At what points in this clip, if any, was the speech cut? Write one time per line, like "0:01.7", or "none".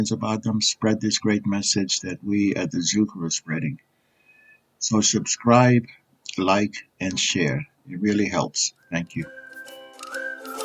0:09.5